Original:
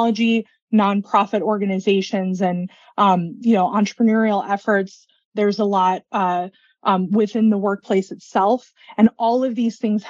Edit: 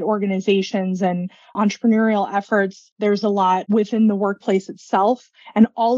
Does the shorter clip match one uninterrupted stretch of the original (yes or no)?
no